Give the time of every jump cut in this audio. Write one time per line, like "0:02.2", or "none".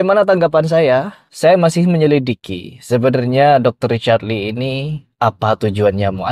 none